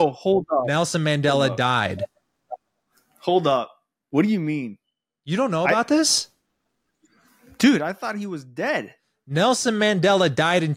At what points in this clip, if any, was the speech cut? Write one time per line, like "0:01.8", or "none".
none